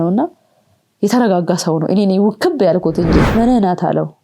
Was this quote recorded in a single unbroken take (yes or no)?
no